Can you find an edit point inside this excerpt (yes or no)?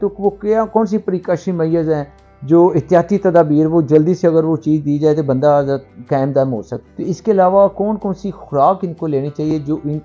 yes